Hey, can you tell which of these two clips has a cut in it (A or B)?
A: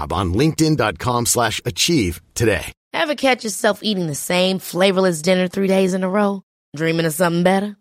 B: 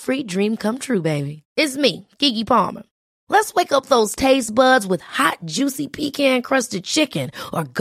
A